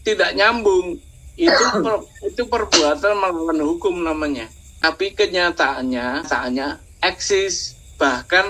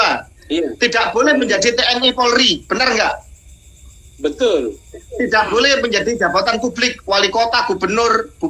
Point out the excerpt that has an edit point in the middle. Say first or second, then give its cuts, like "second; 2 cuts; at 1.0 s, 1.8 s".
first; 2 cuts; at 4.8 s, 6.4 s